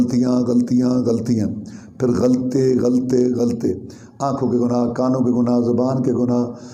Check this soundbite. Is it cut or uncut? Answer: uncut